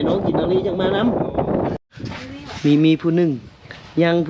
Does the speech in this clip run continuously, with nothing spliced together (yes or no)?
no